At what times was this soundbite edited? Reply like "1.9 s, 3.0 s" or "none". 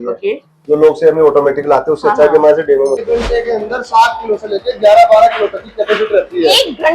3.0 s